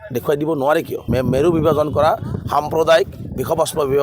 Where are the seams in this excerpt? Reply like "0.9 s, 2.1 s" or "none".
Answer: 1.1 s